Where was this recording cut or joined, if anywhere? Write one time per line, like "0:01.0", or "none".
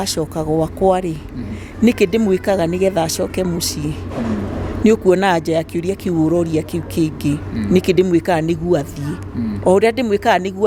none